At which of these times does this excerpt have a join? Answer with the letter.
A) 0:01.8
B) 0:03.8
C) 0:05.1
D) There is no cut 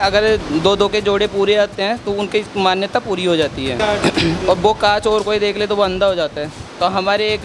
B